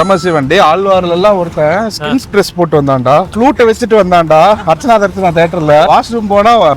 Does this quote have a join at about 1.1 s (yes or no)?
no